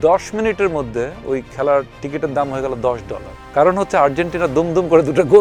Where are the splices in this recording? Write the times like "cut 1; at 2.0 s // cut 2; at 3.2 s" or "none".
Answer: none